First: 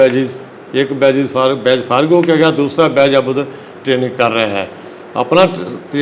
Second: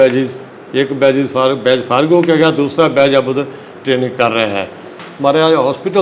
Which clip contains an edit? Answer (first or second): second